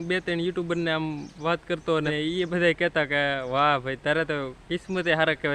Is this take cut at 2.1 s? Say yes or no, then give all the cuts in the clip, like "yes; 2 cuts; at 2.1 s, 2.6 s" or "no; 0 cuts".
yes; 1 cut; at 2.1 s